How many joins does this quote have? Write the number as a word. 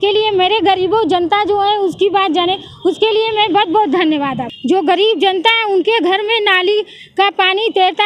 one